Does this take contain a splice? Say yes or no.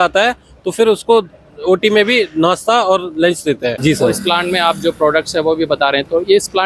yes